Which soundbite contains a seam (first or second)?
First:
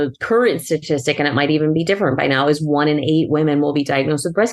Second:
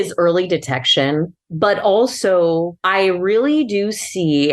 second